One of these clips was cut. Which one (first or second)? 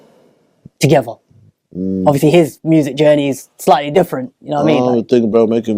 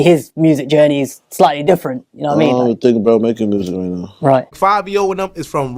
second